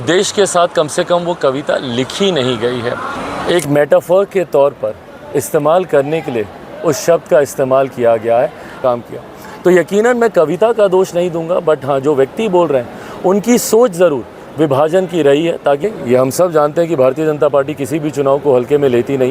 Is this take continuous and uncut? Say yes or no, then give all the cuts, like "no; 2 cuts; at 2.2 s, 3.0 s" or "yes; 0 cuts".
no; 3 cuts; at 3.2 s, 8.8 s, 15.8 s